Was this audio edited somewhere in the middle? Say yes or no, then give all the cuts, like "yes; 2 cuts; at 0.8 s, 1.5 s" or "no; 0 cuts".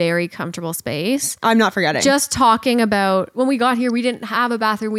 yes; 1 cut; at 1.3 s